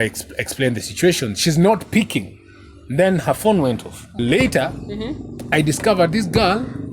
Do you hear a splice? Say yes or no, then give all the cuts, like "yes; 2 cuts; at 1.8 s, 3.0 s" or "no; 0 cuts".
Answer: yes; 1 cut; at 4.2 s